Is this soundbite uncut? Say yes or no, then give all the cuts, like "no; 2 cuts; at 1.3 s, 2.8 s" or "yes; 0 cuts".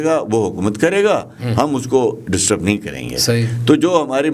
yes; 0 cuts